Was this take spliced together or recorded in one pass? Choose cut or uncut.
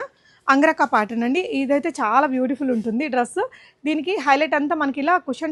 uncut